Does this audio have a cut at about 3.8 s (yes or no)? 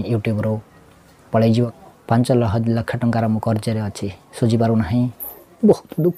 no